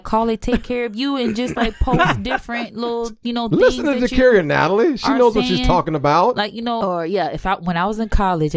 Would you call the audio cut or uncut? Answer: cut